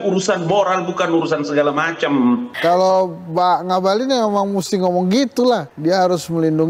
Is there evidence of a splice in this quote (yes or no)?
yes